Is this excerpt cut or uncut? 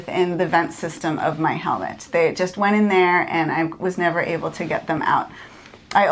uncut